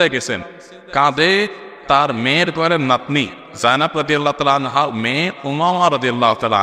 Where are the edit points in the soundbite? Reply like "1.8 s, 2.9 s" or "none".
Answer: none